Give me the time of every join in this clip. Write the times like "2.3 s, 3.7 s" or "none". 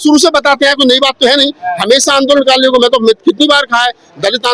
none